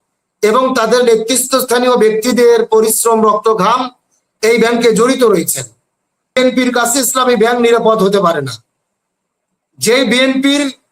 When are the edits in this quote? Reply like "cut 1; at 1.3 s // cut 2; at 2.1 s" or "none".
cut 1; at 6.4 s